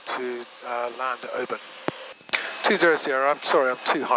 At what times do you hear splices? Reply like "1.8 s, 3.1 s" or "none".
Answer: 2.1 s